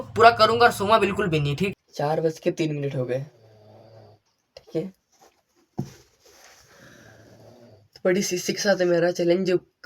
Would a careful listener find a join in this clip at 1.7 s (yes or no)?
yes